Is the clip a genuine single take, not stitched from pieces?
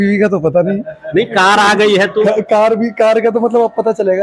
yes; 0 cuts

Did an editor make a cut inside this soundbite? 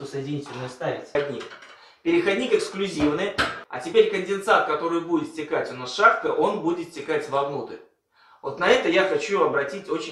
yes; 1 cut; at 1.2 s

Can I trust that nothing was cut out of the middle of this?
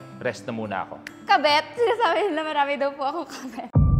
no; 1 cut; at 1.0 s

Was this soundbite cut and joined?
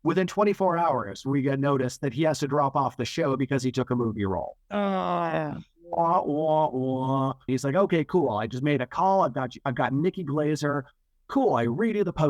yes; 1 cut; at 7.5 s

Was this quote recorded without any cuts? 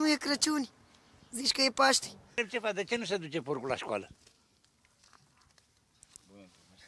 no; 1 cut; at 2.4 s

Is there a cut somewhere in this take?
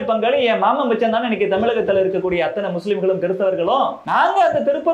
yes; 1 cut; at 4.0 s

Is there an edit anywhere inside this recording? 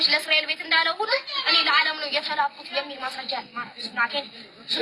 no; 0 cuts

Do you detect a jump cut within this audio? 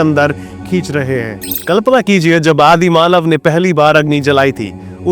yes; 1 cut; at 1.5 s

